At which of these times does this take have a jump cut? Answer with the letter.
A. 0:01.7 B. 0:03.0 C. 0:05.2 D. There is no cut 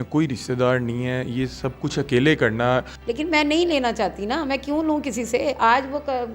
B